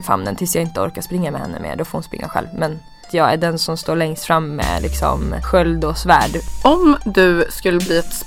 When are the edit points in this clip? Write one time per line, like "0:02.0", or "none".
0:03.1
0:05.4
0:06.4